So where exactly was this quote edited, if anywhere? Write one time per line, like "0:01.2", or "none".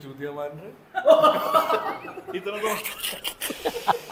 none

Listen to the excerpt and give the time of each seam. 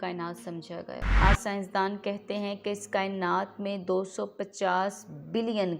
0:01.1

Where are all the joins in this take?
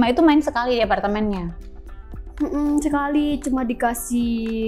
none

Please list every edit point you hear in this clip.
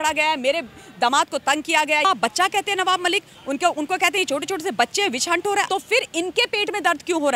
0:02.0
0:05.7

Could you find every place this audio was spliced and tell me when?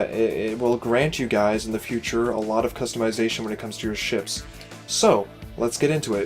0:01.9

